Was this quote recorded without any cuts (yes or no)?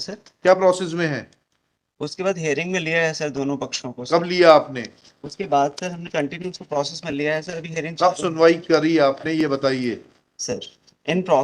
yes